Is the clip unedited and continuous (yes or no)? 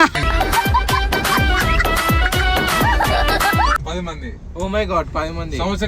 no